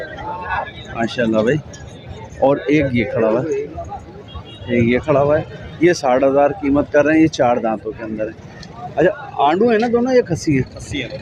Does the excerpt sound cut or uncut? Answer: uncut